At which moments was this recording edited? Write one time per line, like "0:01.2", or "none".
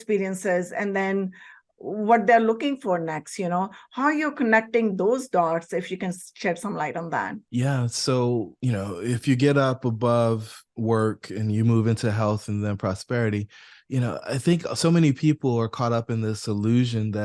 0:07.4
0:08.5